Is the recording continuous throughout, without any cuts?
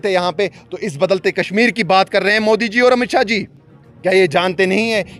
yes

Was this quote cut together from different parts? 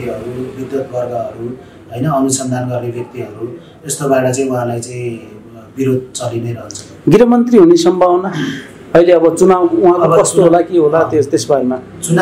no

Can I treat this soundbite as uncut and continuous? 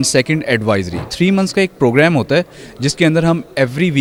yes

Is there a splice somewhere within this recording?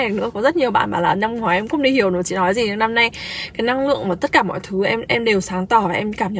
no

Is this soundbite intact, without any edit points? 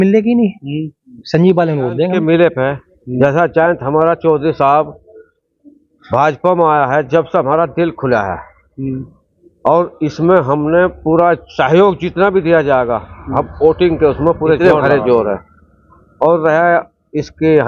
no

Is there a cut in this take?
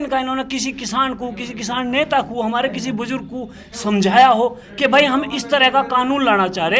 no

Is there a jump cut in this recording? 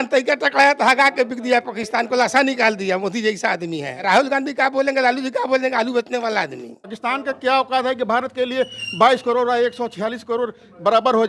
yes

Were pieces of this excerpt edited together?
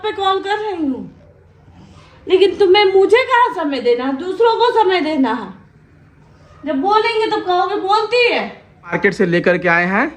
yes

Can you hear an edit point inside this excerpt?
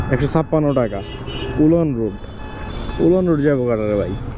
no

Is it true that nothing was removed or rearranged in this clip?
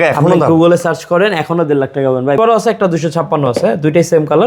no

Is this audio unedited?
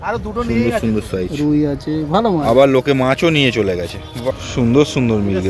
no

